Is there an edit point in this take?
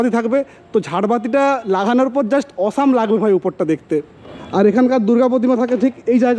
no; 0 cuts

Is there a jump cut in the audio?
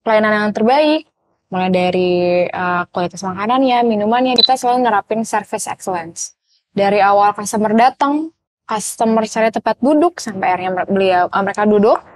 yes; 1 cut; at 4.4 s

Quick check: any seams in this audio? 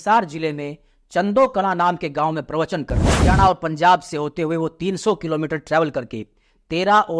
yes; 1 cut; at 3.1 s

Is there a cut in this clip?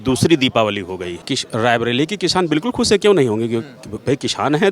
yes; 1 cut; at 1.1 s

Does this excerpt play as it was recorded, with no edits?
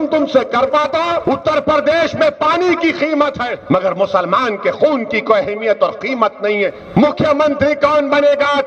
no; 3 cuts; at 1.2 s, 3.5 s, 6.8 s

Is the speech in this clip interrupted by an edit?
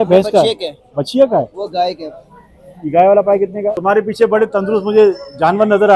yes; 1 cut; at 3.8 s

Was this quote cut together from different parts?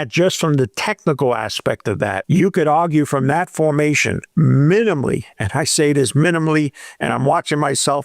yes; 2 cuts; at 1.6 s, 4.2 s

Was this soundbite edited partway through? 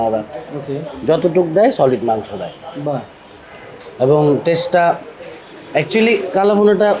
no; 0 cuts

